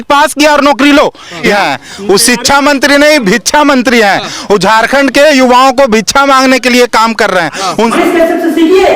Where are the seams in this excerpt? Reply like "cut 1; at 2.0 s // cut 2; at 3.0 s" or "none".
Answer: cut 1; at 1.5 s // cut 2; at 7.9 s

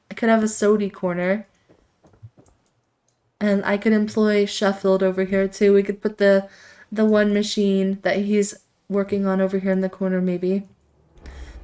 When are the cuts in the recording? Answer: none

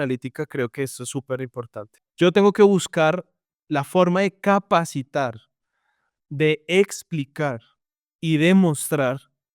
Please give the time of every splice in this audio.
cut 1; at 2.0 s

